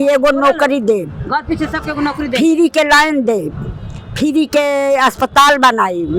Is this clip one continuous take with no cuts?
yes; 0 cuts

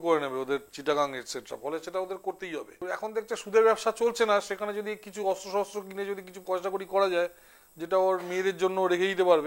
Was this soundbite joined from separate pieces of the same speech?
yes; 1 cut; at 2.9 s

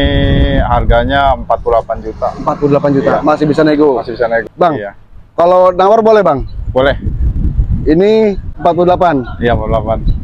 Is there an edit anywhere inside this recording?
yes; 2 cuts; at 4.4 s, 8.5 s

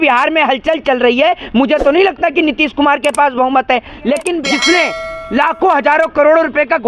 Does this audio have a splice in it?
yes; 1 cut; at 4.4 s

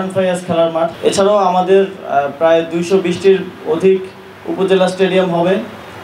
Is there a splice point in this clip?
yes; 1 cut; at 0.9 s

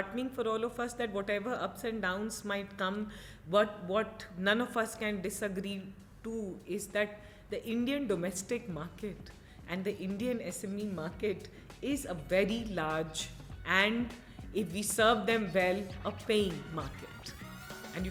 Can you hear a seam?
no; 0 cuts

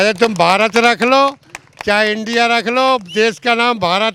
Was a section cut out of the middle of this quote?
no; 0 cuts

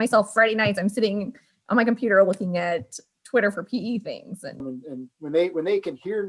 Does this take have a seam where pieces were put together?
yes; 1 cut; at 4.6 s

